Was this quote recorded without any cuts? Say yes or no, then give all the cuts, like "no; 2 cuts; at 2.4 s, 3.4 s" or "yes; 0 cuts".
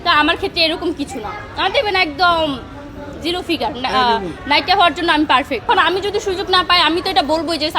no; 1 cut; at 5.7 s